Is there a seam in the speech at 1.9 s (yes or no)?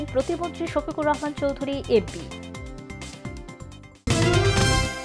no